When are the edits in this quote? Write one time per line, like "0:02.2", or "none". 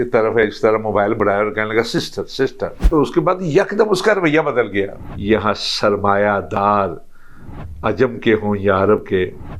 0:02.9
0:05.0